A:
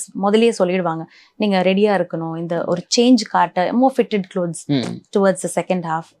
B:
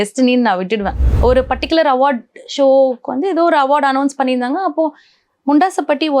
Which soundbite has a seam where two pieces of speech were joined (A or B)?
B